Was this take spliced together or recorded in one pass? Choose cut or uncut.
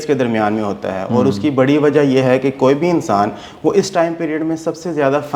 uncut